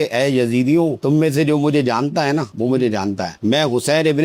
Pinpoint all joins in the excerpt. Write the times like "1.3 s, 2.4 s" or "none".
3.4 s